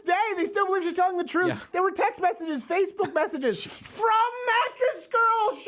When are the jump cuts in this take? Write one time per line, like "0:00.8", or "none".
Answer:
0:01.7